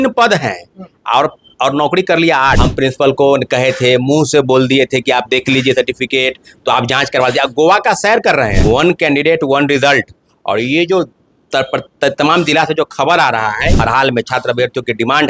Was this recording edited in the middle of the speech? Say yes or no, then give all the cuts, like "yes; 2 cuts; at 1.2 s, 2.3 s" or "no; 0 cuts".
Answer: yes; 3 cuts; at 2.6 s, 8.6 s, 13.7 s